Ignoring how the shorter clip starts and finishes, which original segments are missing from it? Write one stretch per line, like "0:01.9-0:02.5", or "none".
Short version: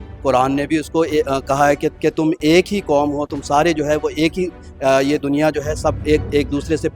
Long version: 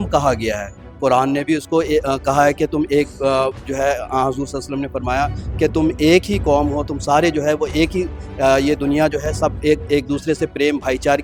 0:02.7-0:05.5